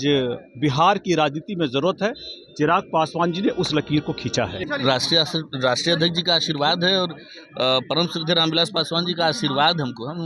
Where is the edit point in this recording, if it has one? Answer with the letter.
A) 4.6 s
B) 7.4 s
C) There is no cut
A